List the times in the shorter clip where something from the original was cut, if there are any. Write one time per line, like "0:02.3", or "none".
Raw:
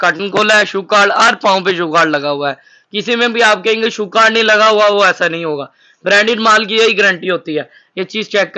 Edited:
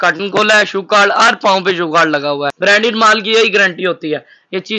0:02.5